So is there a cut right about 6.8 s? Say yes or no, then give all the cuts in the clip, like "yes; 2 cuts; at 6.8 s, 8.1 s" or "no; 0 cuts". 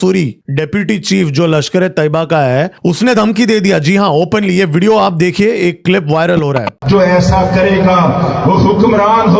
yes; 1 cut; at 6.8 s